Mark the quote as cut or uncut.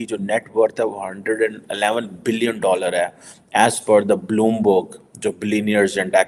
uncut